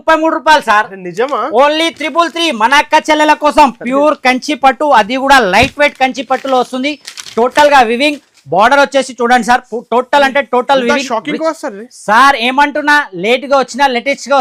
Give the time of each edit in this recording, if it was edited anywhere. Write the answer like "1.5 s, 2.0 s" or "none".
none